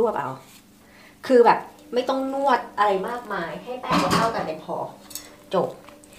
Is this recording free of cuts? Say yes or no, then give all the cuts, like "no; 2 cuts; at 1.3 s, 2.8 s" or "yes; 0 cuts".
yes; 0 cuts